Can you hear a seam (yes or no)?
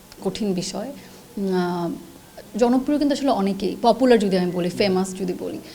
no